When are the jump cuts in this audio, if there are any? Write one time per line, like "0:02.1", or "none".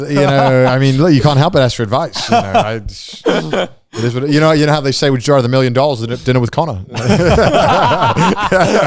none